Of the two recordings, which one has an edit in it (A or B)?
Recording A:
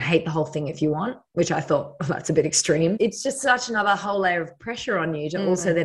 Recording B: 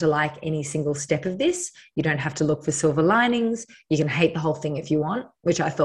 A